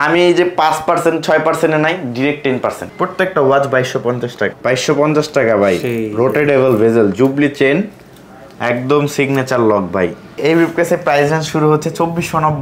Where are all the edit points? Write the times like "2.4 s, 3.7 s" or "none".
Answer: 2.8 s, 4.5 s, 10.4 s